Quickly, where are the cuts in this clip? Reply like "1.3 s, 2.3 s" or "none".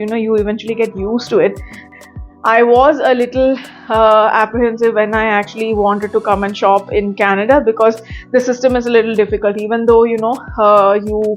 1.9 s